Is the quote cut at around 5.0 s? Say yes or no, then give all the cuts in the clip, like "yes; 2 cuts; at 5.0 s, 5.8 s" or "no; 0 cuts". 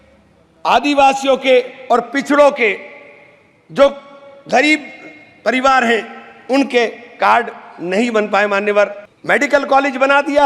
no; 1 cut; at 9.1 s